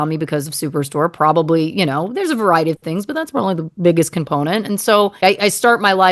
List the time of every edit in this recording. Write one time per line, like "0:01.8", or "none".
0:05.2